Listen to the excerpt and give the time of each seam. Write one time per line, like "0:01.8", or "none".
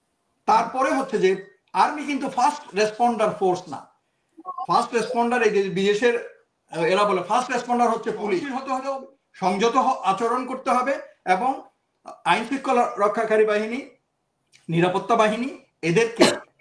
0:08.7